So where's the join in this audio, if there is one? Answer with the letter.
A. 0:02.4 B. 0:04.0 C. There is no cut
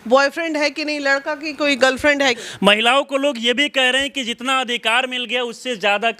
A